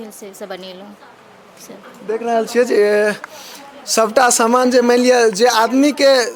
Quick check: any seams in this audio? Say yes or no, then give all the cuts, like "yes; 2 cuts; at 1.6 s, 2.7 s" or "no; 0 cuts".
no; 0 cuts